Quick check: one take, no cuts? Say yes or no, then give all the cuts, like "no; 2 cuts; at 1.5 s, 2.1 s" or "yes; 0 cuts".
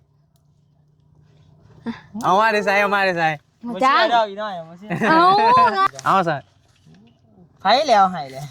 no; 1 cut; at 5.9 s